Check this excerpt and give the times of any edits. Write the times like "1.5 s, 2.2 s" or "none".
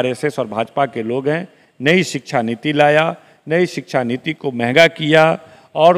none